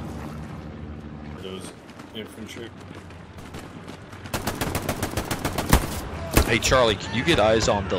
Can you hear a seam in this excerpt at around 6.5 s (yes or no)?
no